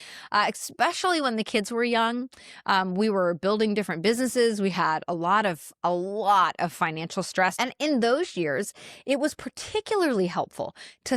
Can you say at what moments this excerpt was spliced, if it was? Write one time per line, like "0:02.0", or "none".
0:07.5

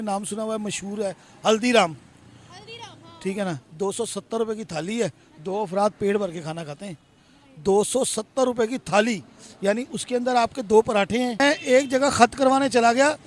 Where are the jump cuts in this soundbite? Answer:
0:11.4

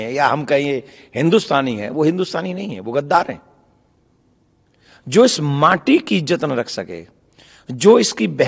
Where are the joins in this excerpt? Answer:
none

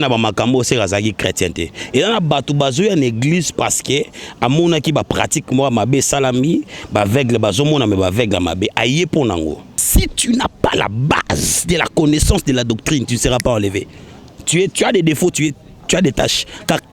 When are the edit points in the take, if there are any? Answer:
0:09.7

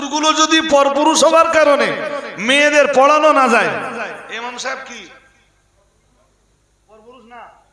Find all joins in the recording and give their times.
none

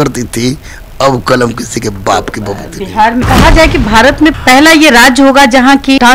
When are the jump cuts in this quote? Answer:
0:03.2

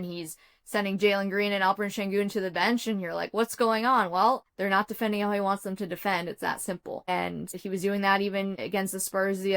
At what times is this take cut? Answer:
0:04.5
0:07.1
0:08.5

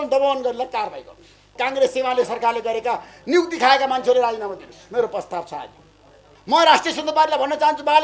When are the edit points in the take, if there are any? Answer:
0:01.6
0:06.3

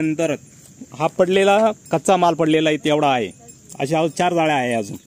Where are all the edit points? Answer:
none

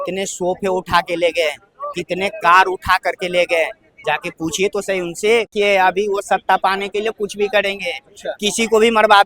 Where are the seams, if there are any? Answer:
0:05.5

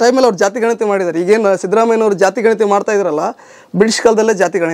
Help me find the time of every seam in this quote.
none

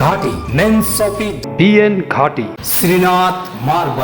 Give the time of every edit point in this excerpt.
0:01.4
0:02.6

